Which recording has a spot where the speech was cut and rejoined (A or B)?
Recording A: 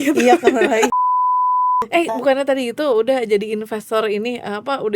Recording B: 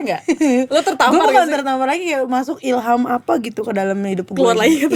A